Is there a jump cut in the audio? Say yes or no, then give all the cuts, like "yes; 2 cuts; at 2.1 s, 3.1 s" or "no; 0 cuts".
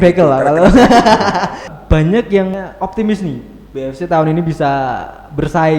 yes; 2 cuts; at 1.7 s, 2.5 s